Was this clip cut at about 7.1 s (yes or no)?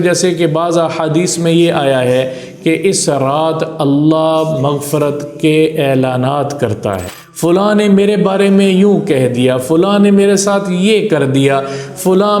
yes